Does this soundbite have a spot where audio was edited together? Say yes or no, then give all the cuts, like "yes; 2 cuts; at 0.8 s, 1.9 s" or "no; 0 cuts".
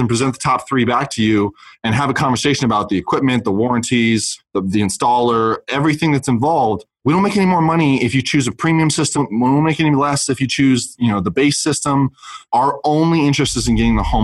no; 0 cuts